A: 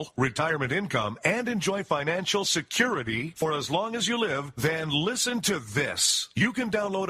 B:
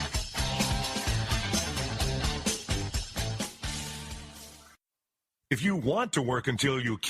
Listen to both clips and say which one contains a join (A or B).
B